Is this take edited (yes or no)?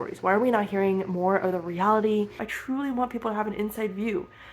yes